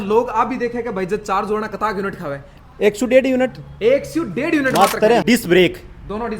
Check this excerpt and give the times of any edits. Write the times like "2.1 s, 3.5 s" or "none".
5.2 s